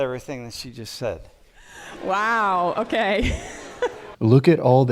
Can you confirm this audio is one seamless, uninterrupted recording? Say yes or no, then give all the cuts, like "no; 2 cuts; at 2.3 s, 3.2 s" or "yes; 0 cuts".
no; 2 cuts; at 1.6 s, 4.0 s